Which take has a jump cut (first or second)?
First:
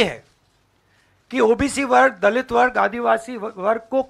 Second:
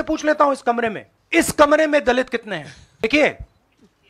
second